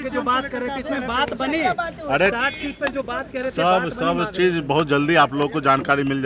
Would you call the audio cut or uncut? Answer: uncut